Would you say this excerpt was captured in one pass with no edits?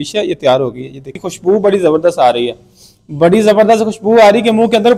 no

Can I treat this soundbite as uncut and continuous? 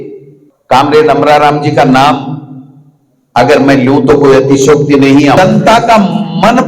no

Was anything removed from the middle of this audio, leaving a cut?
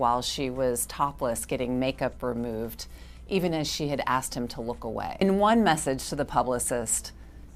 yes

